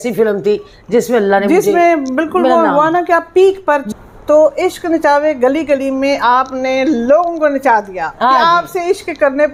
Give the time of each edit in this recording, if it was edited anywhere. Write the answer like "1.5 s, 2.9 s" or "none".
none